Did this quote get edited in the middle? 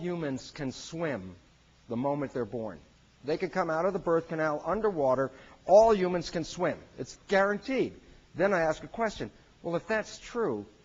no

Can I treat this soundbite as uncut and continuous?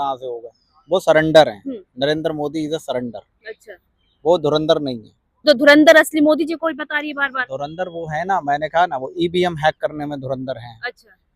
no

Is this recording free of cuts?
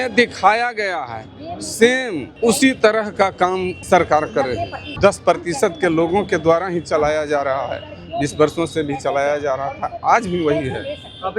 no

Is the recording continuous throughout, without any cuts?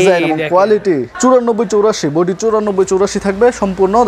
no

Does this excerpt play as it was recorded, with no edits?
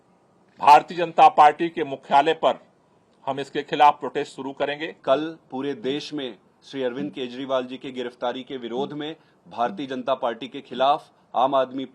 yes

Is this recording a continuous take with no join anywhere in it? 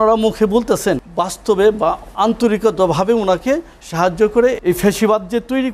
no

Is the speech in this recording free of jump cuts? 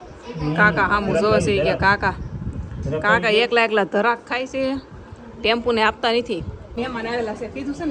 no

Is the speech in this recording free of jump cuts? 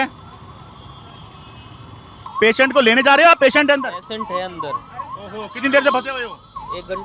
no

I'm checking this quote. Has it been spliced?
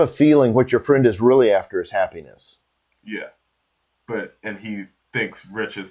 no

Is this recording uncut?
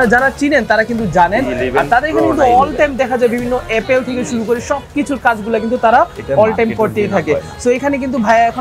yes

